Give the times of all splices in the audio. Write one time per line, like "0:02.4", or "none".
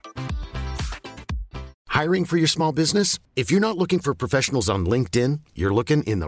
0:01.8

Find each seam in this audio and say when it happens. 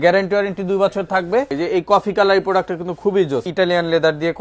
0:01.5
0:03.5

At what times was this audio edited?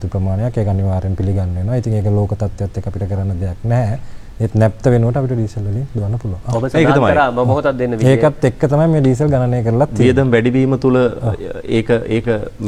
none

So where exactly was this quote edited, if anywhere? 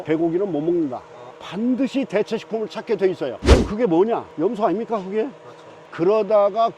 0:01.4
0:05.7

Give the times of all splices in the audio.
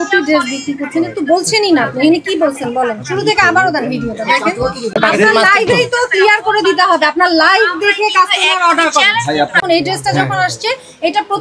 0:04.9
0:09.6

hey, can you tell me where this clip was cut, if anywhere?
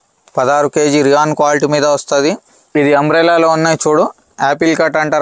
0:02.5

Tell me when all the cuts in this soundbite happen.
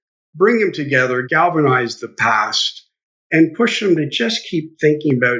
0:01.3

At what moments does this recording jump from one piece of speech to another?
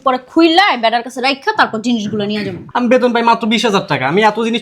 0:02.6

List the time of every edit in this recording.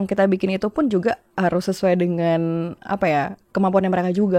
none

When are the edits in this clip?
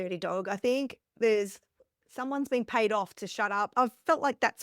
0:03.7

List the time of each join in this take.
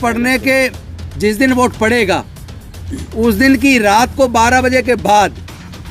none

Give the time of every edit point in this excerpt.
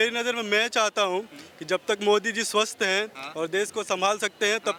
none

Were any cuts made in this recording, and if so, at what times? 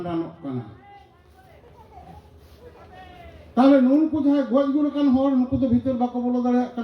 0:03.4

